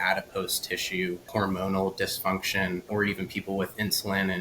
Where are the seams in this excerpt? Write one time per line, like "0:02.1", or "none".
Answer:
0:01.3
0:02.9